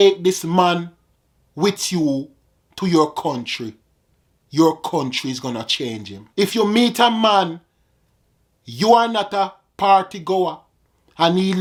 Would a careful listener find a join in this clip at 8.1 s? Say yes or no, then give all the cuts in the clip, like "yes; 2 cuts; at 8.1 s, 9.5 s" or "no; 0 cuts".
no; 0 cuts